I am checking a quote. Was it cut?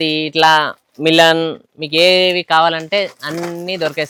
no; 0 cuts

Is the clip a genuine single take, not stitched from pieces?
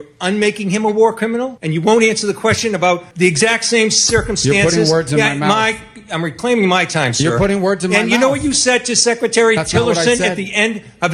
no; 2 cuts; at 1.6 s, 3.1 s

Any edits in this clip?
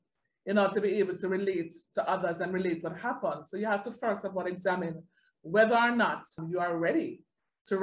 yes; 1 cut; at 6.4 s

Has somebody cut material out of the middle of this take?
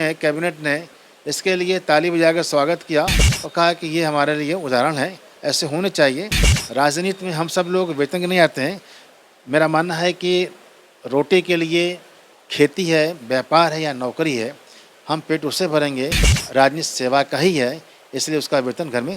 no; 0 cuts

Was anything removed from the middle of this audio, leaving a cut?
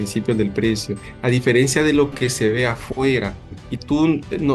no; 0 cuts

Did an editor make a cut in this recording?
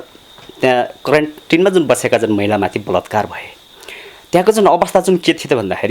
no; 0 cuts

